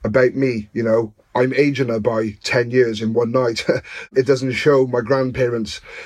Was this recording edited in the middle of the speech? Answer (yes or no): yes